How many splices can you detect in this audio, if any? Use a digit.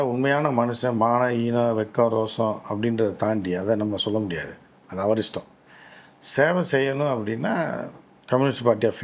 0